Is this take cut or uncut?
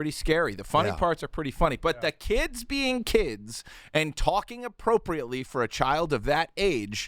uncut